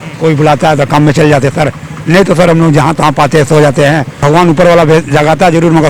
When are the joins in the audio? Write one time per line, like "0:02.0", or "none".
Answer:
0:04.2